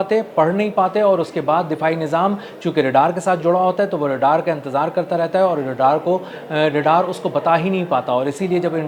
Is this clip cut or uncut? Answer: uncut